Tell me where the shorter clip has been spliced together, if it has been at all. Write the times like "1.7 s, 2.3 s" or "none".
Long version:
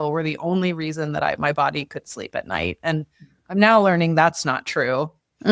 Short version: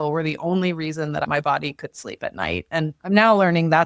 1.2 s, 3.0 s